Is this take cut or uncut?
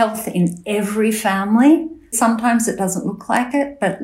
cut